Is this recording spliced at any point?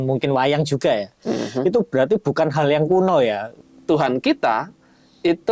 yes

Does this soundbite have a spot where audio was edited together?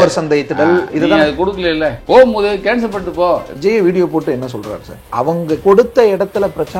yes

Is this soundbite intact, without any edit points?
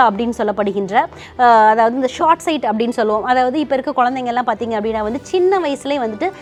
yes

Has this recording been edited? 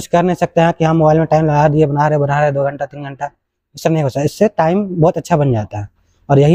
no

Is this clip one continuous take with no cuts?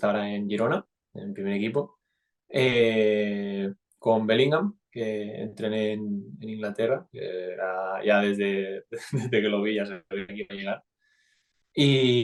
yes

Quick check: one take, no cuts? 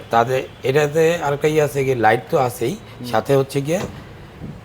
yes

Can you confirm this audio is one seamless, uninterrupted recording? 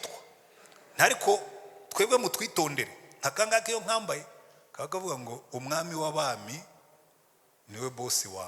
yes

